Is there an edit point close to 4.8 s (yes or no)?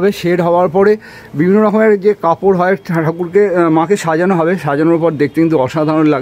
no